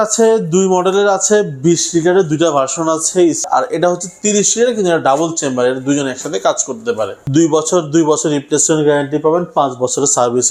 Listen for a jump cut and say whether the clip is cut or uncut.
cut